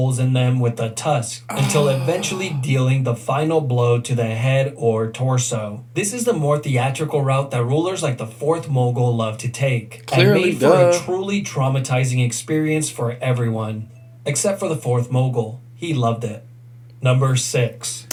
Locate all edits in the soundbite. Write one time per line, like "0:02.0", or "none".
none

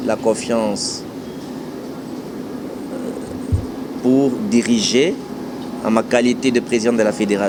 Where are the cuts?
none

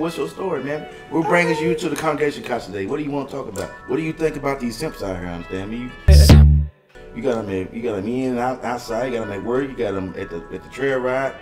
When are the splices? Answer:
none

